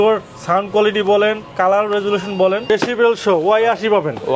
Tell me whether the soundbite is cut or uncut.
cut